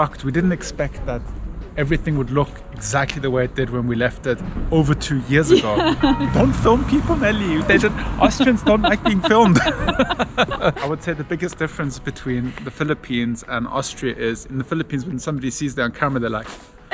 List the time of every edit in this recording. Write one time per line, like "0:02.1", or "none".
0:06.2
0:10.8